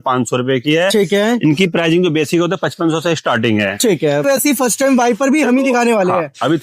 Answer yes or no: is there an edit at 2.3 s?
no